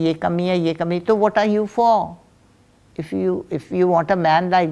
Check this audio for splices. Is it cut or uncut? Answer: uncut